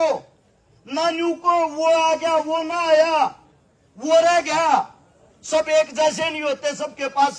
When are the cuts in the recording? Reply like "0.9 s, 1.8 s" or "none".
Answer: none